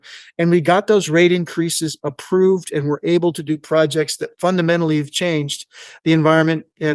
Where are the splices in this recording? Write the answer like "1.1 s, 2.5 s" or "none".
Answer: none